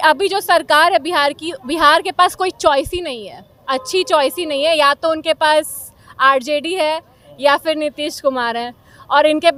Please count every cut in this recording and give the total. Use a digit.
0